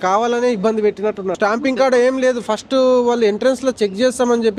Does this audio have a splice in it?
yes; 1 cut; at 1.4 s

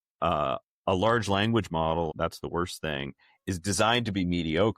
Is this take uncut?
no; 1 cut; at 2.1 s

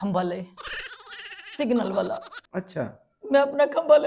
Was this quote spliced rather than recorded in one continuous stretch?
no; 0 cuts

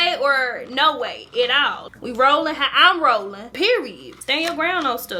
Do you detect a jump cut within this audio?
no; 0 cuts

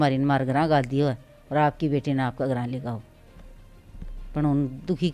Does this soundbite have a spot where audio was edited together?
no; 0 cuts

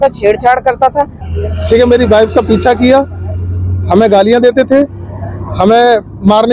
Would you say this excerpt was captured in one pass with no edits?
no; 1 cut; at 1.2 s

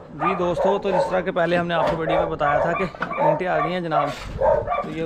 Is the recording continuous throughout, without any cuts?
yes; 0 cuts

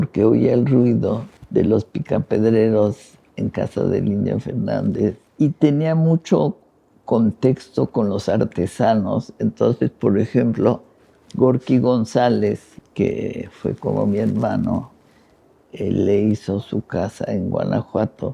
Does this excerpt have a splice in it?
yes; 3 cuts; at 1.3 s, 5.2 s, 12.8 s

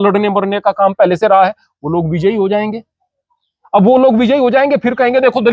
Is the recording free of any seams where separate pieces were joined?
yes; 0 cuts

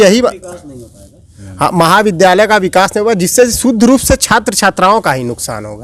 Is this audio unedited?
yes; 0 cuts

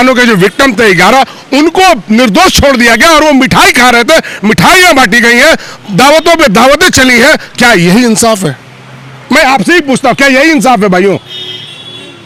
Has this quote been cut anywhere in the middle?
no; 0 cuts

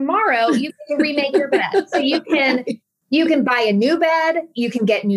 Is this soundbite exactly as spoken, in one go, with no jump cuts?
yes; 0 cuts

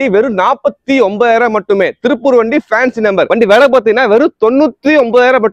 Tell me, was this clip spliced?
yes; 1 cut; at 3.3 s

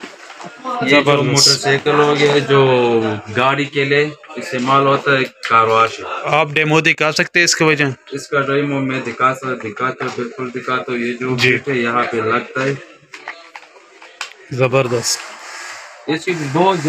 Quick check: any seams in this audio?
no; 0 cuts

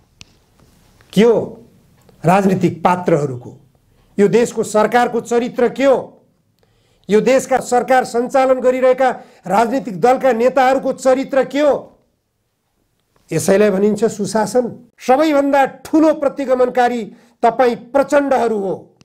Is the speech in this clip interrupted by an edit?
yes; 1 cut; at 14.8 s

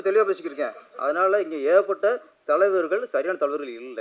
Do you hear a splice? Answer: no; 0 cuts

